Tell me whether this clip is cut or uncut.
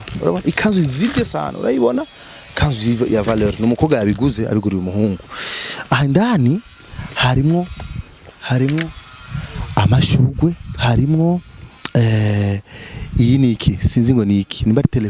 uncut